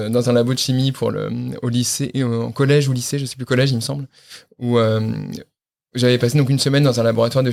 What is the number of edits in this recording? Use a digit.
0